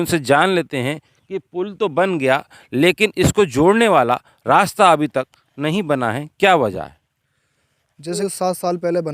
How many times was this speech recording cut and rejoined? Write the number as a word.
one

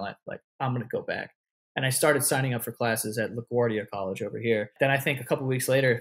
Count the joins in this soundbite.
one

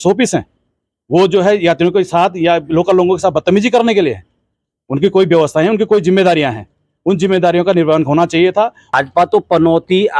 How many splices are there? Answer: one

